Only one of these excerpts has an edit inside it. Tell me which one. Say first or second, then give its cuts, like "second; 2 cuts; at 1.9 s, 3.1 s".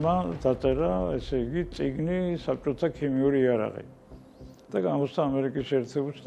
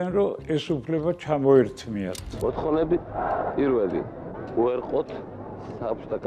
second; 1 cut; at 2.2 s